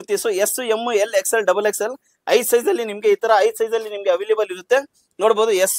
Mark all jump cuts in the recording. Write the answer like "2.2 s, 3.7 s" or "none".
none